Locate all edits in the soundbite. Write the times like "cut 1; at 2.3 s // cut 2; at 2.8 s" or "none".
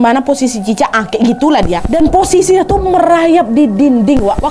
cut 1; at 1.8 s